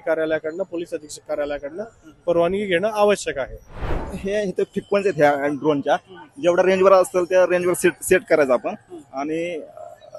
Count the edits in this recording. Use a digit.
1